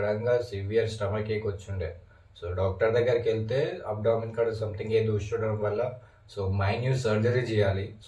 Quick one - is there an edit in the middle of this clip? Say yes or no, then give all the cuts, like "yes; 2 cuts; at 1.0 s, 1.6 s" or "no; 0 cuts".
no; 0 cuts